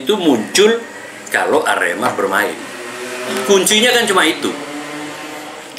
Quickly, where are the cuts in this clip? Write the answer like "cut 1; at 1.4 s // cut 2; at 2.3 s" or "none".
none